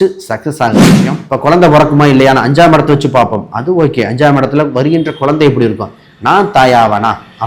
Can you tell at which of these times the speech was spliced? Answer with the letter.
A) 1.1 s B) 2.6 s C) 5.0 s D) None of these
A